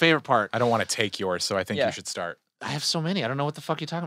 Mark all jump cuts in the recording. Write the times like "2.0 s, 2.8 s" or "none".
2.5 s